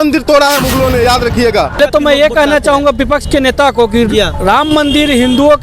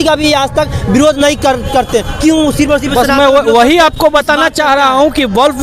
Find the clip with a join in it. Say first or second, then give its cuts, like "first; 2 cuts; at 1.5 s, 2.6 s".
first; 1 cut; at 1.8 s